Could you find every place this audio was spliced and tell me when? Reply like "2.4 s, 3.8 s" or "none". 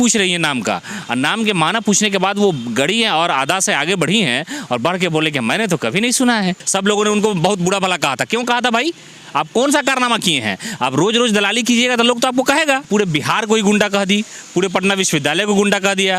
6.6 s, 12.9 s